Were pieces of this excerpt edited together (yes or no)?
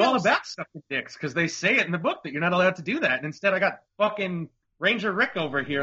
yes